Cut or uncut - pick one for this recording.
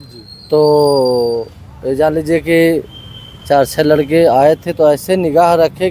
uncut